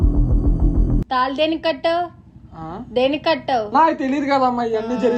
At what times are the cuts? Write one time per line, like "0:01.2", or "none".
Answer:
0:01.0